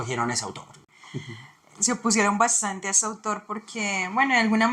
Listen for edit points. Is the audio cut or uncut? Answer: cut